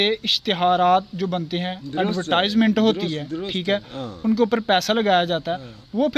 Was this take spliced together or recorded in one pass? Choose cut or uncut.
uncut